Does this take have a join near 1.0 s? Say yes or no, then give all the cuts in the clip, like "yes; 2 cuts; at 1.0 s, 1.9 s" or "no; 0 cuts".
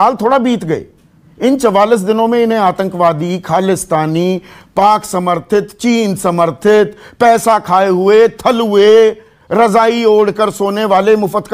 no; 0 cuts